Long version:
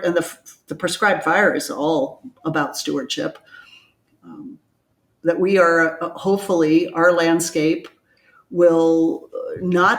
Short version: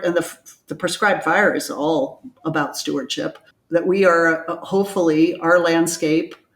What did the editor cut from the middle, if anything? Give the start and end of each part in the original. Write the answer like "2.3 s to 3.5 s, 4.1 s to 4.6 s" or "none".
3.5 s to 5.0 s